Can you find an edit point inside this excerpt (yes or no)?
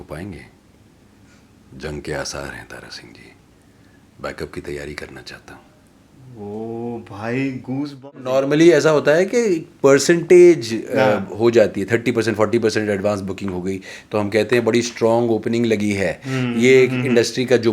yes